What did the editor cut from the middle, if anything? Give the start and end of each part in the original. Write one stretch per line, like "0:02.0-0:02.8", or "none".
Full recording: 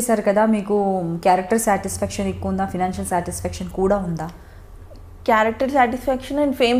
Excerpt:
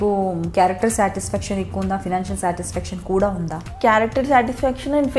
0:04.3-0:05.1